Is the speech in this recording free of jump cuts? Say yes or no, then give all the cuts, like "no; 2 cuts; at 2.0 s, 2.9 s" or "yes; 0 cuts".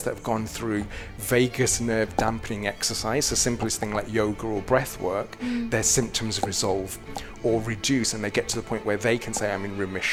yes; 0 cuts